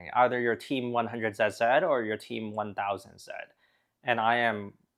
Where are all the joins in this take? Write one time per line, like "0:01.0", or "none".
none